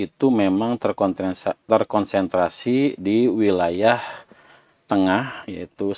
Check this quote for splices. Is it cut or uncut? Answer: uncut